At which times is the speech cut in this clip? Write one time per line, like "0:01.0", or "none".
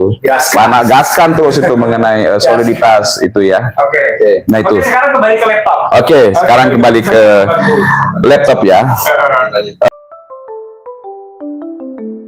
none